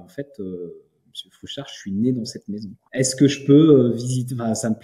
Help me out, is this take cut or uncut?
cut